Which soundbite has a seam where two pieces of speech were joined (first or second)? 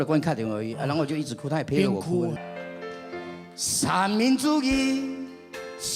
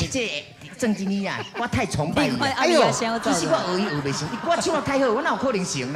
first